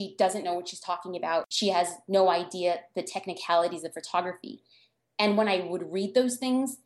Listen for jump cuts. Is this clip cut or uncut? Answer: cut